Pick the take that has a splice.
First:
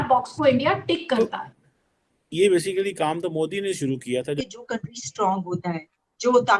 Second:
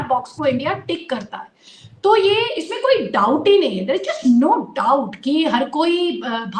first; 2 cuts; at 1.2 s, 4.4 s

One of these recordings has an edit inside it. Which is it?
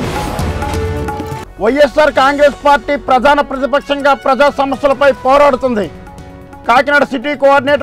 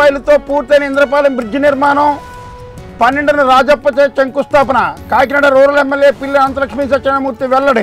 first; 1 cut; at 1.4 s

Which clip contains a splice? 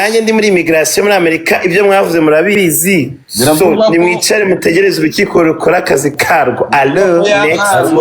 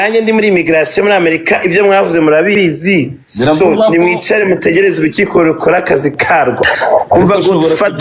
second; 1 cut; at 6.7 s

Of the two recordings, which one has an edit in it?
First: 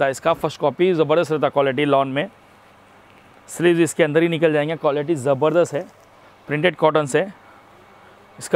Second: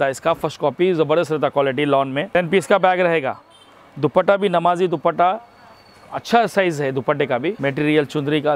second; 2 cuts; at 2.3 s, 7.6 s

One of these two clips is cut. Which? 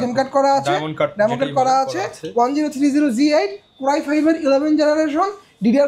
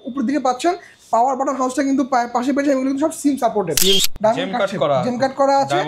second; 1 cut; at 4.1 s

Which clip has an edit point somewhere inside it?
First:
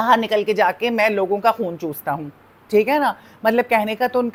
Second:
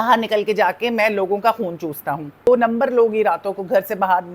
second; 1 cut; at 2.5 s

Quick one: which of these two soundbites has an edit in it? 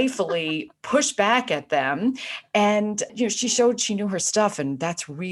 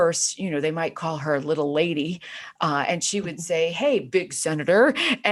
first; 1 cut; at 3.1 s

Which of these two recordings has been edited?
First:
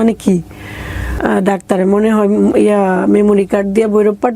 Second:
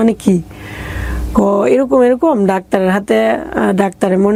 first; 1 cut; at 1.1 s

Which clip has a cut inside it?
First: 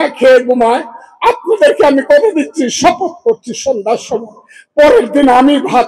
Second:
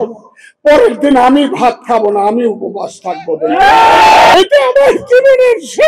second; 1 cut; at 4.3 s

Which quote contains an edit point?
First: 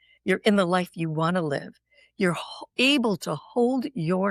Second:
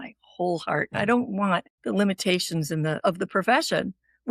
second; 2 cuts; at 1.7 s, 3.0 s

